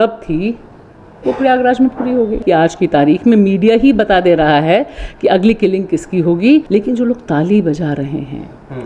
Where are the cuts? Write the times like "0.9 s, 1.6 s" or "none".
2.4 s, 6.7 s